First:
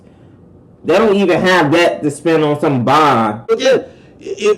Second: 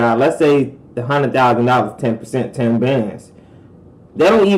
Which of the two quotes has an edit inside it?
first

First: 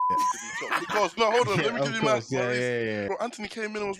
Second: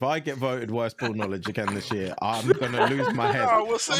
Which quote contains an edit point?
first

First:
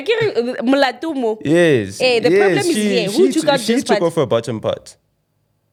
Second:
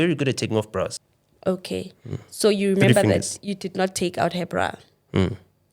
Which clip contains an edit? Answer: second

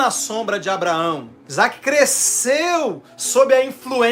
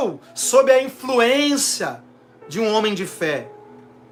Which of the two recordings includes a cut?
first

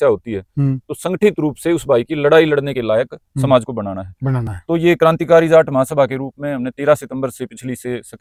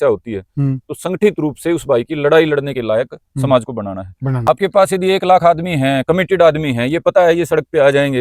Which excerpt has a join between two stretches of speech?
second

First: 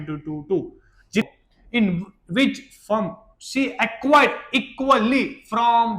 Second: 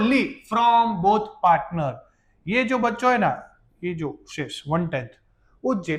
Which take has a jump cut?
first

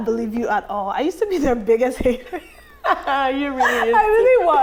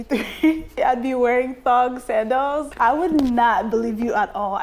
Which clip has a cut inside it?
second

